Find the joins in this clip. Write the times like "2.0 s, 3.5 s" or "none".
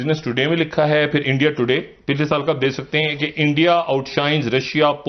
none